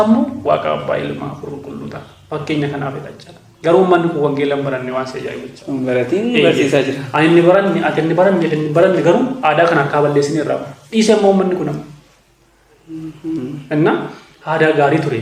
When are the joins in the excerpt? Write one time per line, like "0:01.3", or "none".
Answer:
none